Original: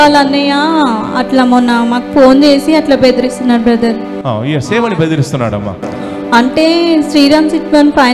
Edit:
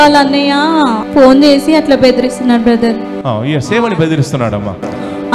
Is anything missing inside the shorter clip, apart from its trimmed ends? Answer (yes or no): yes